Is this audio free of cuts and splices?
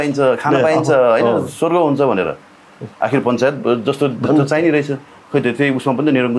yes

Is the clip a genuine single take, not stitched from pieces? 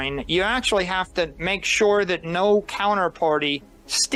yes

